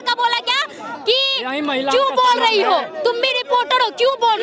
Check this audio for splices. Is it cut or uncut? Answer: uncut